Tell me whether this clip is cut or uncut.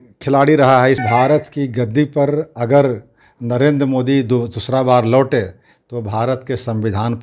cut